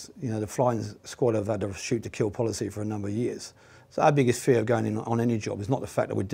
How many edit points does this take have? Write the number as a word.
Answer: one